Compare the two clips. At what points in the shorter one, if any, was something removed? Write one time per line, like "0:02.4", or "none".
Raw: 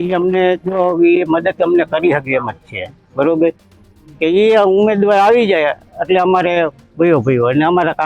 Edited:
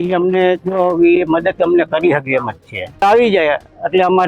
0:03.0